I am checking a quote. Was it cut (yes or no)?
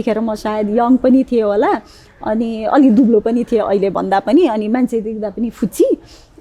no